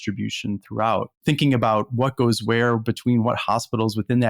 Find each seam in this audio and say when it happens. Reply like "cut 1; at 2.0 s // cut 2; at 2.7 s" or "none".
cut 1; at 1.2 s